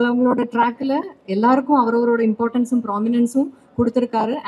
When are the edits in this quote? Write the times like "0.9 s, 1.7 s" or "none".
none